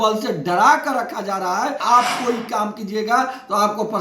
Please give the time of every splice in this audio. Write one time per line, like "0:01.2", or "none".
0:01.8

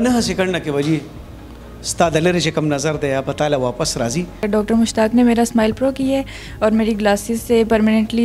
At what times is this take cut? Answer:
0:04.4

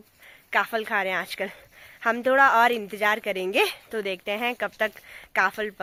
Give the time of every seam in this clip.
none

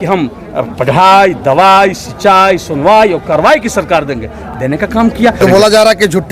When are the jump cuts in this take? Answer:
0:05.4

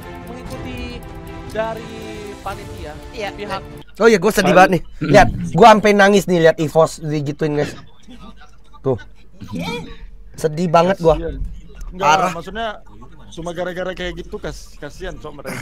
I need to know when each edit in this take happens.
0:03.0
0:03.7

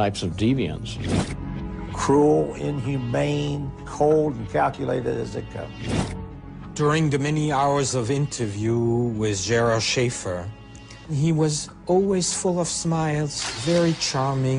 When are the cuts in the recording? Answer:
0:08.2

